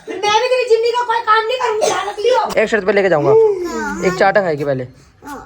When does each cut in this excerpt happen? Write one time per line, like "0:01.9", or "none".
0:02.5